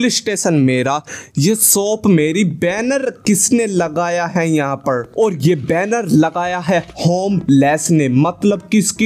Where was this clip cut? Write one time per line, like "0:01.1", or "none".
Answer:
none